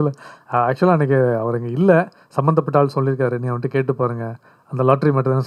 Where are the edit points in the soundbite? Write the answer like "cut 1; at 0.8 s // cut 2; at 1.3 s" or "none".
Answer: none